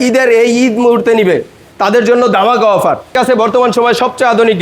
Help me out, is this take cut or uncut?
cut